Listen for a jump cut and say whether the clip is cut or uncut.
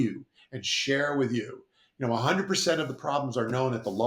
uncut